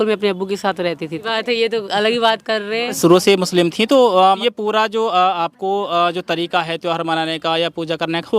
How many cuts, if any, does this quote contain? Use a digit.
3